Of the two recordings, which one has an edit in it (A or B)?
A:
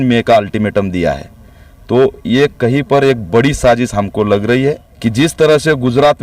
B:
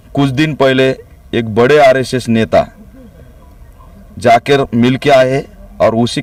A